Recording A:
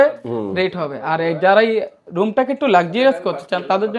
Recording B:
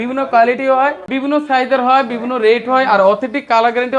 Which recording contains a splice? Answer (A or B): B